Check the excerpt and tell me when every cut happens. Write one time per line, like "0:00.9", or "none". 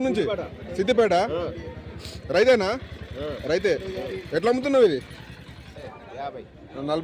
0:05.9